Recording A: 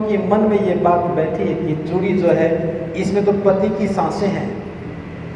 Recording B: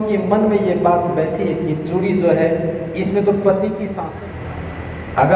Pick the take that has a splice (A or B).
B